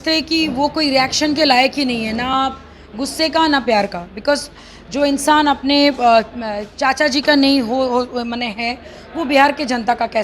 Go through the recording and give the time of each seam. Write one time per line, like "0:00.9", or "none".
none